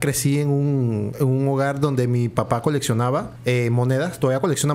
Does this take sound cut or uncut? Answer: cut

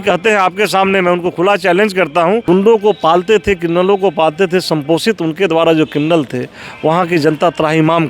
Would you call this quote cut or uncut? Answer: cut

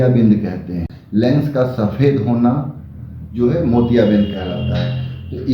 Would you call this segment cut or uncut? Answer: cut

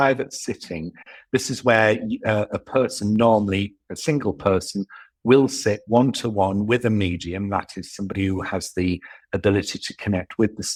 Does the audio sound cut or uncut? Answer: uncut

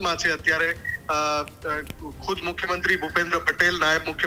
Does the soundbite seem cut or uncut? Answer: uncut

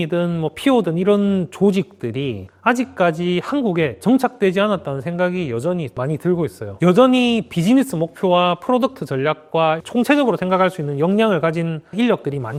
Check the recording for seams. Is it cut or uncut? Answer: uncut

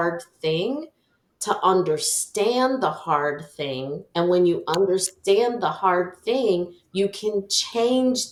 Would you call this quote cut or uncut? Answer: uncut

